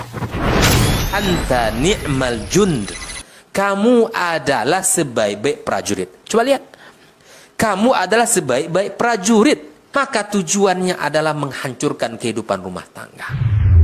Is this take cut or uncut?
uncut